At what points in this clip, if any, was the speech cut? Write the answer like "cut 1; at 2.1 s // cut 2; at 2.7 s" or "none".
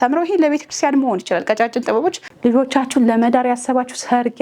cut 1; at 2.3 s